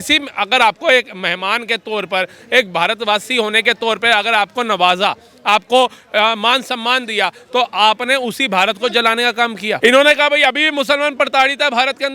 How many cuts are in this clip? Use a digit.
0